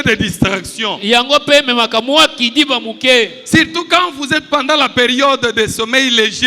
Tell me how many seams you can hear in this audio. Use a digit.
0